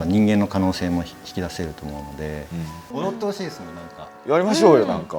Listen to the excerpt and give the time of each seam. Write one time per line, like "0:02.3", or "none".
0:02.8